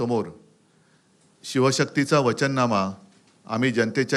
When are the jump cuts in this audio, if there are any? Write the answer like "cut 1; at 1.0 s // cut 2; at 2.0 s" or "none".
none